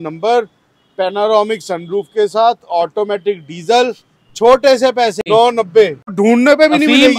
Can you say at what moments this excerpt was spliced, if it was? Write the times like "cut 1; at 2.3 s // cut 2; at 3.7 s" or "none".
cut 1; at 5.2 s // cut 2; at 6.1 s